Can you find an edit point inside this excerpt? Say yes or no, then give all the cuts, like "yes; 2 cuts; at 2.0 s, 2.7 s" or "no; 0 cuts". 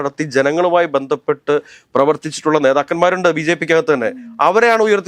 no; 0 cuts